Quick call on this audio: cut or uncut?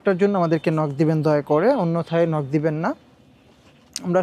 uncut